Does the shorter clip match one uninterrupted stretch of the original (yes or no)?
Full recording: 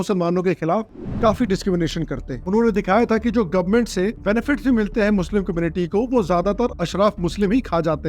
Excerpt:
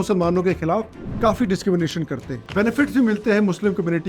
no